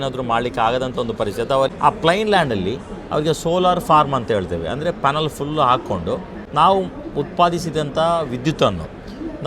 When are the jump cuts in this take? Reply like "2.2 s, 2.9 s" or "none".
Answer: 1.7 s, 6.4 s